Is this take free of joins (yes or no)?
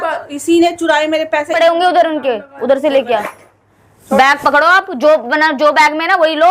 no